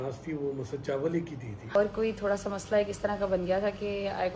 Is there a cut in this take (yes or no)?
yes